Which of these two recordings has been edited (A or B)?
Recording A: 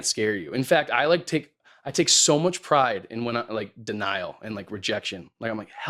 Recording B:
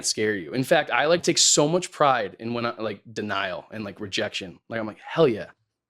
B